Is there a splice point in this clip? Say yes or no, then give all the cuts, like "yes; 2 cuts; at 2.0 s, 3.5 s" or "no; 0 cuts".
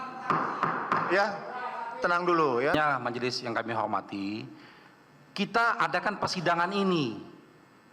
yes; 1 cut; at 2.7 s